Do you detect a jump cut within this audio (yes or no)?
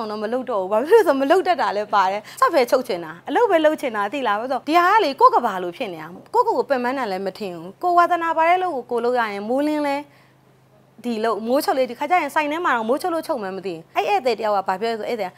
yes